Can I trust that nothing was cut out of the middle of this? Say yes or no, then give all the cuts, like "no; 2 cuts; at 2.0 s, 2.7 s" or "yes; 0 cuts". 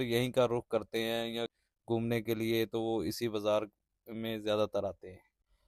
no; 1 cut; at 1.7 s